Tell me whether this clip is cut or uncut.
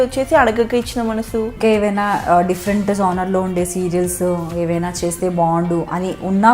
cut